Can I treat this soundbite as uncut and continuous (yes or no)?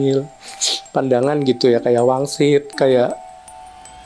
yes